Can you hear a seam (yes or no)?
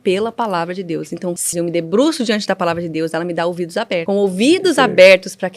yes